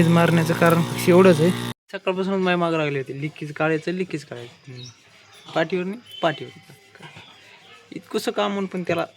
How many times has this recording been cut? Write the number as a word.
one